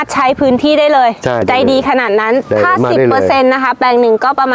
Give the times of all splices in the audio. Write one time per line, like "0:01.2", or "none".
0:01.4